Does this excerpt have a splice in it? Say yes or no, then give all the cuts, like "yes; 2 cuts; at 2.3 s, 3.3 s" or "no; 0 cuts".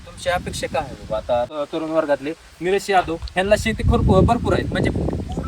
yes; 1 cut; at 1.5 s